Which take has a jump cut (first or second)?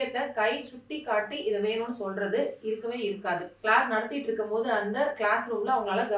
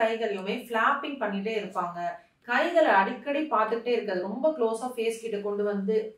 first